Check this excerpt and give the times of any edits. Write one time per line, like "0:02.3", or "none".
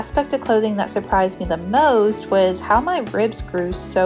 none

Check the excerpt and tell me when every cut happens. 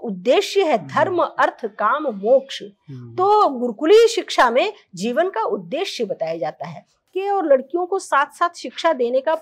0:07.1

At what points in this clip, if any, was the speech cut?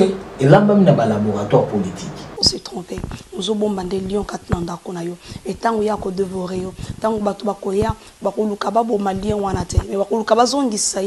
0:02.5

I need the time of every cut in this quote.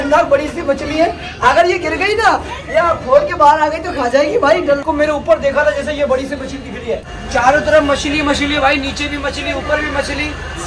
0:04.8
0:07.1

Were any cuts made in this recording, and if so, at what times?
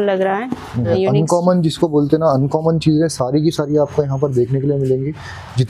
0:00.9

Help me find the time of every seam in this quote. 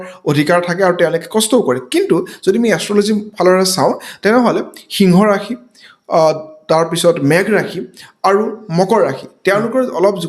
none

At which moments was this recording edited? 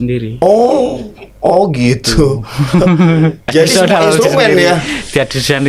none

